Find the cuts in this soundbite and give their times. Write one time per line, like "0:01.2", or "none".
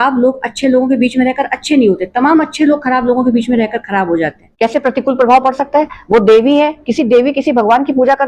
0:04.4

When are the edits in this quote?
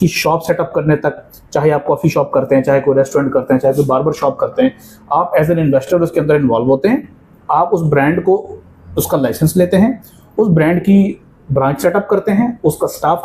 none

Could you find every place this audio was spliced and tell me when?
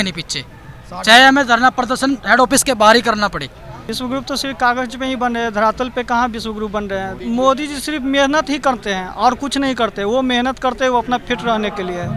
0:03.8
0:07.2

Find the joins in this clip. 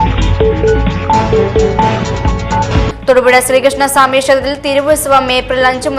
0:02.1

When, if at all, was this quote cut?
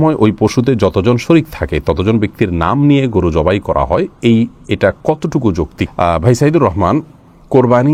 none

